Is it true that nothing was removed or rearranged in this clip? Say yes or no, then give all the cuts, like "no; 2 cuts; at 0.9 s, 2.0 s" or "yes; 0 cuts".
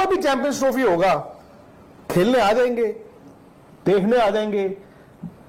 yes; 0 cuts